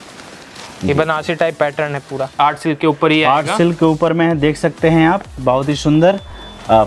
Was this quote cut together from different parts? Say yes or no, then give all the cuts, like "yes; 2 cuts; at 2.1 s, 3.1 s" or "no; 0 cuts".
yes; 1 cut; at 2.3 s